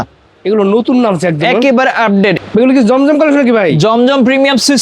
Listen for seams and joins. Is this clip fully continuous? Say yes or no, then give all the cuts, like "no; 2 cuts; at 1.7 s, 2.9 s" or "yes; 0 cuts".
no; 1 cut; at 2.4 s